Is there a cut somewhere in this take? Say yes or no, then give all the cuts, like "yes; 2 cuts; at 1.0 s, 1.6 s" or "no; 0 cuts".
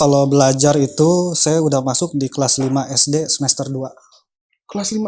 no; 0 cuts